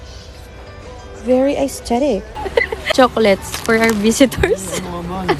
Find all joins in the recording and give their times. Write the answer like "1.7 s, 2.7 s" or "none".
2.3 s